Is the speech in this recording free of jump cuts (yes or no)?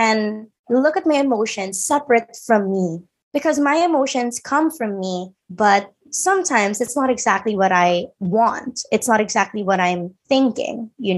yes